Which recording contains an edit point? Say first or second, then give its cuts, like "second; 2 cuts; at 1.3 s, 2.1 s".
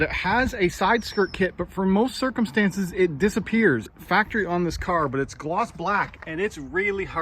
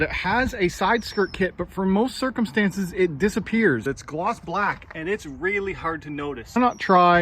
second; 2 cuts; at 3.8 s, 6.6 s